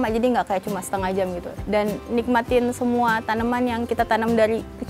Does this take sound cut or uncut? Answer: cut